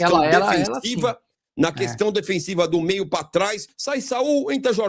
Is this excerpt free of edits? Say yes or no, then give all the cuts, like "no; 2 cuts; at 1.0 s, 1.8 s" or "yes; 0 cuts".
no; 1 cut; at 3.7 s